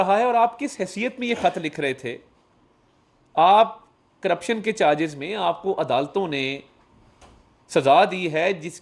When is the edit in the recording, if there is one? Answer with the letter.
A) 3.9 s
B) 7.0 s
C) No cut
C